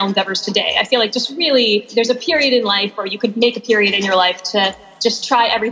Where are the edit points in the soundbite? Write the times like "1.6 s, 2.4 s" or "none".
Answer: 1.9 s